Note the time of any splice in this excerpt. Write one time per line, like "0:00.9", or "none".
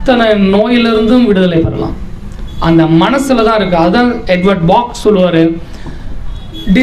none